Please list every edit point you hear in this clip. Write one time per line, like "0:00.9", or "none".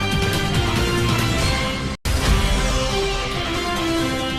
0:01.8